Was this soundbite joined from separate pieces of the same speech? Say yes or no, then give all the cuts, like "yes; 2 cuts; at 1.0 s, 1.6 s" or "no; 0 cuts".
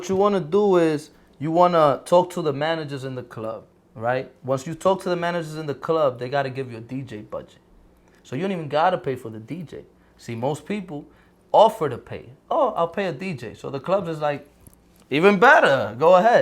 no; 0 cuts